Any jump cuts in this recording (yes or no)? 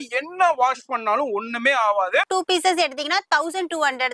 yes